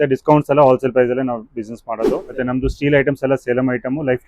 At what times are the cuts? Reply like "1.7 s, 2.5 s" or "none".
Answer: 2.3 s